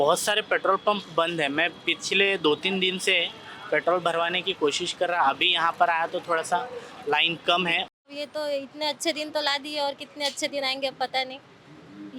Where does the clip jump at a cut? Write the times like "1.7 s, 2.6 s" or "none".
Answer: 8.0 s

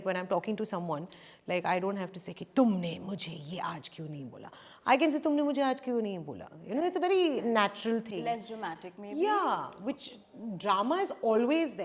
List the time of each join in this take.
none

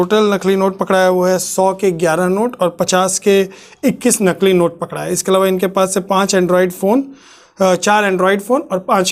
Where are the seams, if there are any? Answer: none

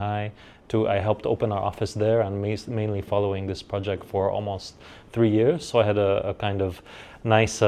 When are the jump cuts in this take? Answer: none

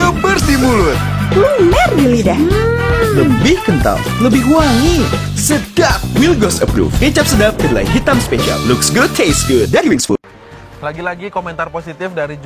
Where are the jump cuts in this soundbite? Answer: 10.7 s

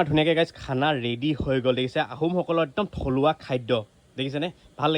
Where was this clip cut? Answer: none

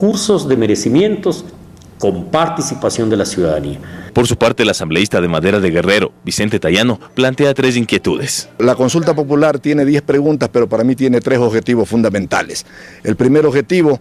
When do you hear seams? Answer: 12.9 s

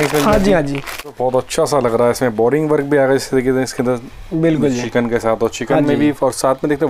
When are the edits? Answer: 1.0 s

